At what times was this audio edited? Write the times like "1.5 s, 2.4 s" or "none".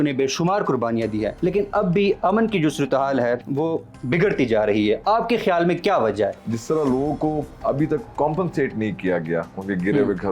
1.3 s, 3.5 s, 6.4 s, 7.5 s